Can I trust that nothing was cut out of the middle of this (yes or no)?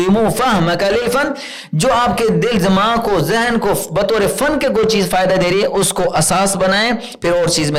yes